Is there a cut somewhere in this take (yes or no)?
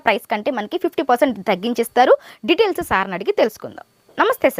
no